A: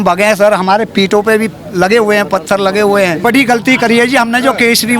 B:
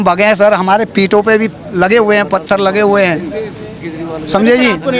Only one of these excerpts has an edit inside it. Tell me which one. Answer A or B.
A